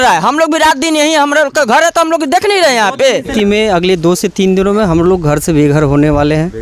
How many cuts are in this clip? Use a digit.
1